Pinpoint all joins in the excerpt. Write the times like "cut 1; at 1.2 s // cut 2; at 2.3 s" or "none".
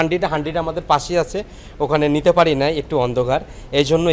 none